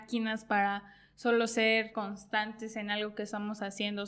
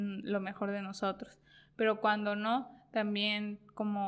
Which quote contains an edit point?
first; 1 cut; at 2.0 s

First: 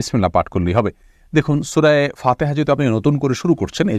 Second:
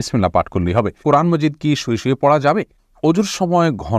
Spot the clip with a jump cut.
second; 2 cuts; at 1.0 s, 2.8 s

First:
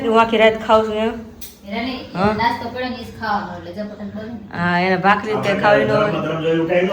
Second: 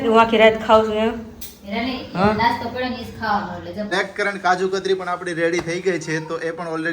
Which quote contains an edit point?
second; 1 cut; at 3.9 s

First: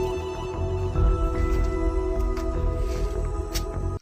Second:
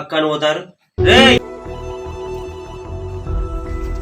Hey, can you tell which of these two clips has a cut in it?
second; 1 cut; at 1.4 s

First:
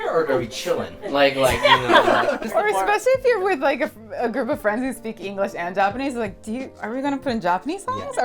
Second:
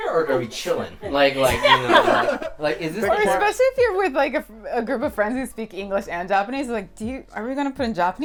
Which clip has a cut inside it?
first; 1 cut; at 2.4 s

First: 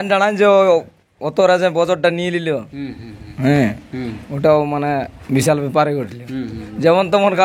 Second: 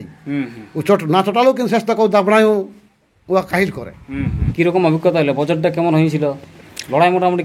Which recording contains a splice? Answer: second; 1 cut; at 4.5 s

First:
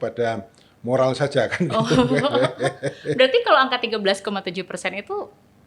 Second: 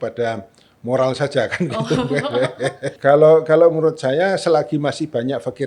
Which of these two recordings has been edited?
second; 1 cut; at 3.0 s

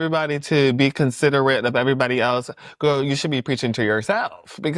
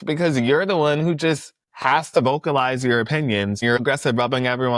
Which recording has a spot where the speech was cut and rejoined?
second; 1 cut; at 3.7 s

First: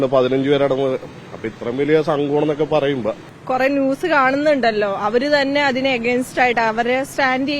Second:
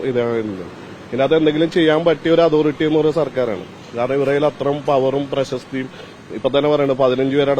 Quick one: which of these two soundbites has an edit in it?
first; 1 cut; at 3.3 s

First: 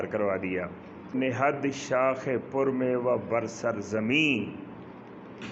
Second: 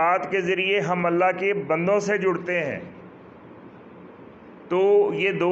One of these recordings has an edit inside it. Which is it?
first; 1 cut; at 1.2 s

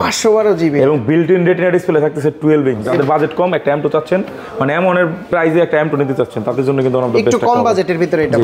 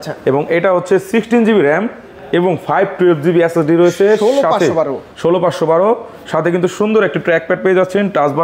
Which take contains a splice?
first; 1 cut; at 2.8 s

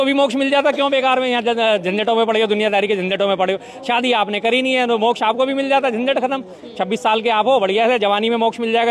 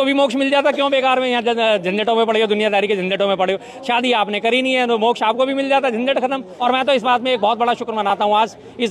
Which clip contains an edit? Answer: second; 1 cut; at 6.5 s

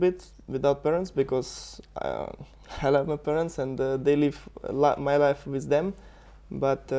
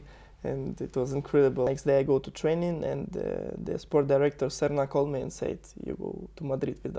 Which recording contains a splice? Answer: second; 1 cut; at 1.7 s

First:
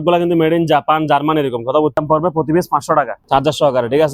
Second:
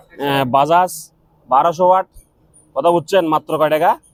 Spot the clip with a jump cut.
first; 2 cuts; at 2.0 s, 3.2 s

